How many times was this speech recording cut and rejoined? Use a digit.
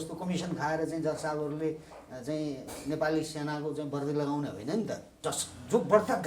1